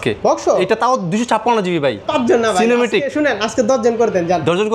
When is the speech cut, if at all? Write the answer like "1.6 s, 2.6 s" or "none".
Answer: 2.0 s